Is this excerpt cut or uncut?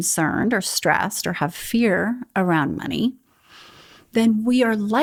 uncut